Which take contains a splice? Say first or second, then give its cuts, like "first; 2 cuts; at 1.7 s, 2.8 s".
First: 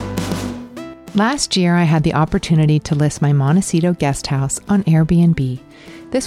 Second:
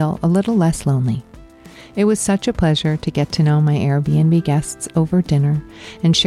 first; 1 cut; at 1.0 s